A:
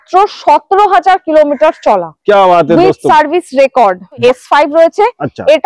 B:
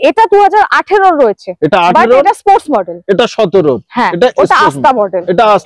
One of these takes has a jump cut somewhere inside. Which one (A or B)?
A